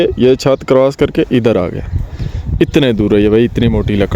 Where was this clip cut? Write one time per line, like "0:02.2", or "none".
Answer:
none